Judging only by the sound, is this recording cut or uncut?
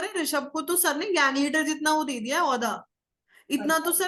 uncut